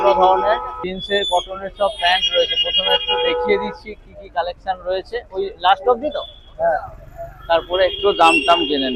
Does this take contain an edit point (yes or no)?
no